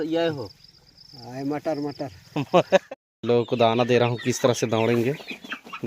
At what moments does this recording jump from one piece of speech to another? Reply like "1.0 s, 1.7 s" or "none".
2.8 s